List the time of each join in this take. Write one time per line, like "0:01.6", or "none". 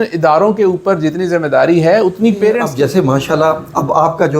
0:02.7